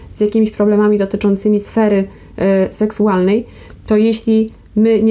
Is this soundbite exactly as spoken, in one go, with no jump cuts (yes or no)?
yes